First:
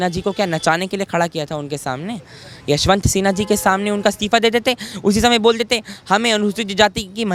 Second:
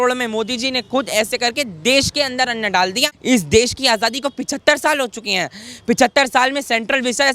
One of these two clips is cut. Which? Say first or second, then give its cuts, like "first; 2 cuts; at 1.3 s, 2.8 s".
second; 1 cut; at 3.1 s